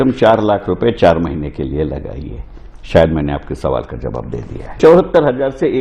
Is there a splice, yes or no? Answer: yes